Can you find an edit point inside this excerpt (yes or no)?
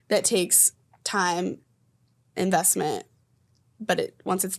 no